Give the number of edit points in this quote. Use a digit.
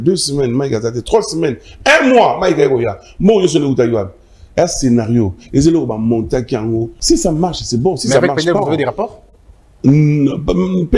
1